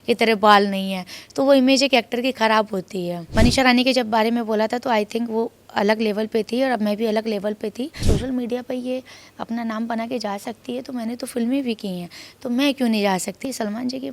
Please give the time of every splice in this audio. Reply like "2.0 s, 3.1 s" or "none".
3.3 s, 8.0 s, 13.4 s